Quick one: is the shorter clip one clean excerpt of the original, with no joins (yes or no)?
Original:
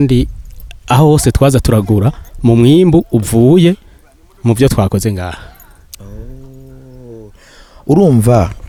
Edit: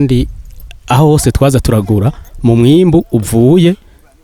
yes